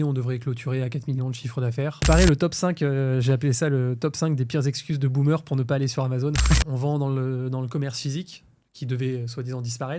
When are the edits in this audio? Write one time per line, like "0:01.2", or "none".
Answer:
0:02.1
0:06.7